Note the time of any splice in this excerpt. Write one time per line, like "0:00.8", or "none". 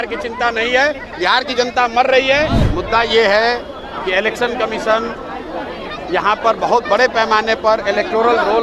0:02.6